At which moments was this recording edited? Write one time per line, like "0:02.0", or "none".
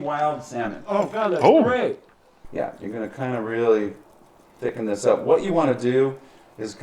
0:02.4